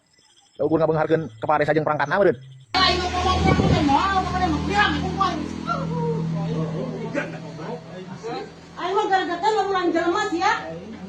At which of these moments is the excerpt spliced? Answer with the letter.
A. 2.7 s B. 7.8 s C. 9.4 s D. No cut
A